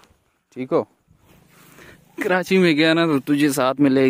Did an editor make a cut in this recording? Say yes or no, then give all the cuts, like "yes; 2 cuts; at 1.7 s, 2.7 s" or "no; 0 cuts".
yes; 1 cut; at 1.2 s